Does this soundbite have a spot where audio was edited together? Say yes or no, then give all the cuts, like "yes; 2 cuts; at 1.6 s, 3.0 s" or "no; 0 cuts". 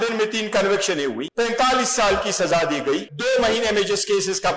yes; 2 cuts; at 1.2 s, 3.1 s